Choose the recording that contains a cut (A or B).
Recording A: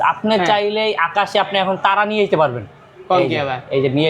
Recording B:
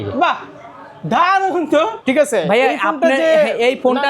B